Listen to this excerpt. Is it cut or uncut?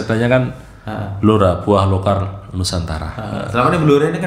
uncut